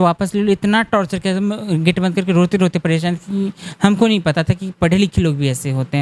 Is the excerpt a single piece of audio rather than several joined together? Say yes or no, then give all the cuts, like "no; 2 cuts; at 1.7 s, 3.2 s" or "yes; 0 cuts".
yes; 0 cuts